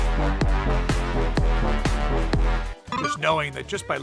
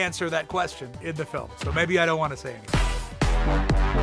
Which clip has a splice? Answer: first; 1 cut; at 2.7 s

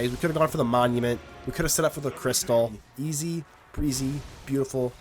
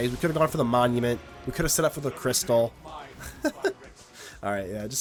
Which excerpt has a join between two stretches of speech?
first; 1 cut; at 2.8 s

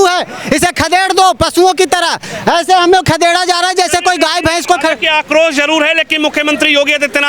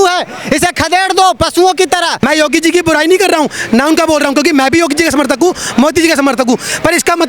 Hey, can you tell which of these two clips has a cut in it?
second; 1 cut; at 2.2 s

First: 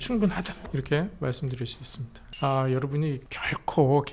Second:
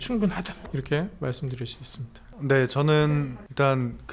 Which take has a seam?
first; 1 cut; at 2.3 s

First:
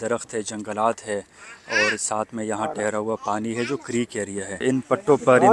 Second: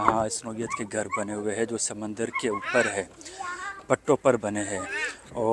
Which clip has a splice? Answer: first; 1 cut; at 4.6 s

